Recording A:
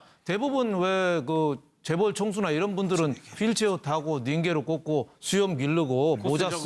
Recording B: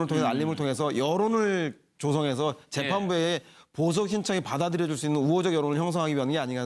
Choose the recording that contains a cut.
A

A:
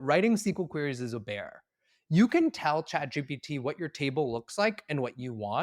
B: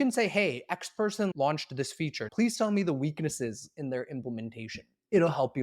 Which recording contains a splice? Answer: B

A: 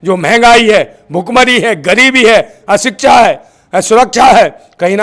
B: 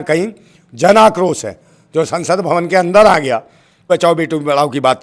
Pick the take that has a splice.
B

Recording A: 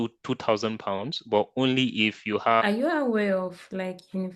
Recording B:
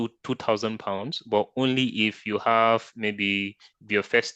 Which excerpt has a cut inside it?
A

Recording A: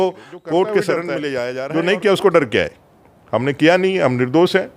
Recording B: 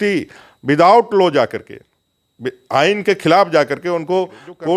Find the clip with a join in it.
A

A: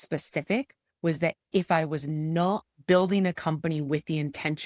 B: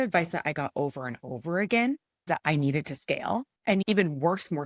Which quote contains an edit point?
B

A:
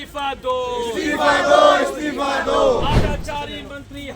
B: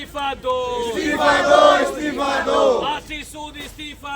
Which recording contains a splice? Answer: A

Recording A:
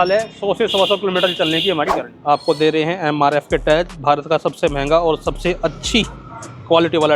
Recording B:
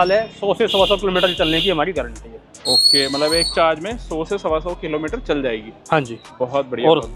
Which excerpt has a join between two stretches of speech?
A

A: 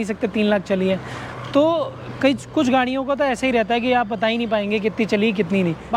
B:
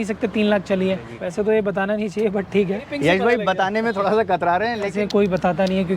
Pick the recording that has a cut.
B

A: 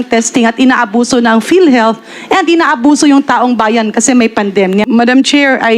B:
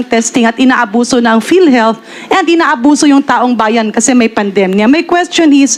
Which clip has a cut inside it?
A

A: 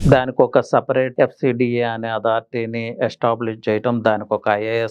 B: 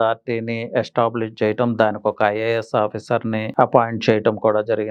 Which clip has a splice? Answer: A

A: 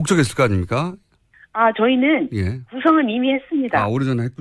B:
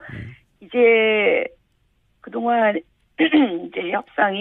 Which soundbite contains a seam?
A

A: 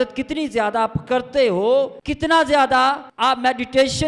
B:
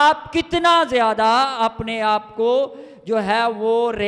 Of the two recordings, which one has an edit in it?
A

